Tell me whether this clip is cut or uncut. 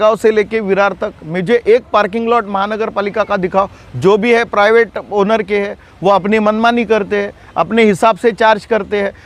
uncut